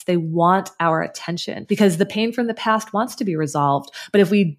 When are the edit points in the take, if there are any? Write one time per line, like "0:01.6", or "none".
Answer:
0:01.5